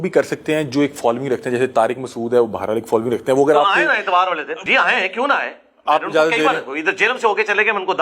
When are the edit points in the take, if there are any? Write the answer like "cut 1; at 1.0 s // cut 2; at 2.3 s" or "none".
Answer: cut 1; at 4.6 s